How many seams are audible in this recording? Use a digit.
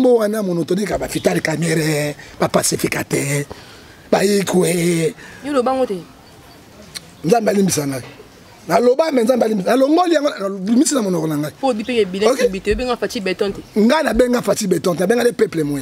0